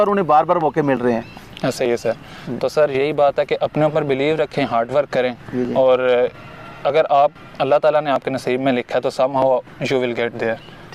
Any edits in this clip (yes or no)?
no